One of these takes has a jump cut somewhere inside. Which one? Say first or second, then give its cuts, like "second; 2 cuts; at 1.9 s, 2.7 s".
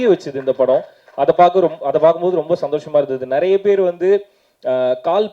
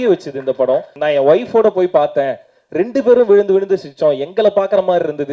second; 1 cut; at 0.9 s